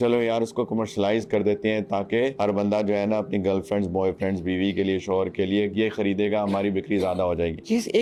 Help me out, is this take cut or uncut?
uncut